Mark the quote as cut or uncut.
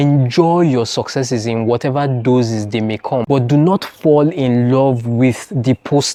uncut